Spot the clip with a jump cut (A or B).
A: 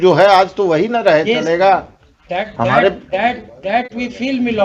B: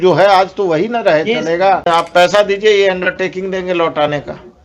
B